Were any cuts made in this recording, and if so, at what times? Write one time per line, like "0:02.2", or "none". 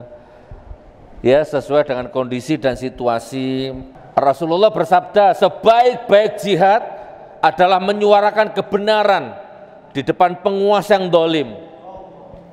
0:03.8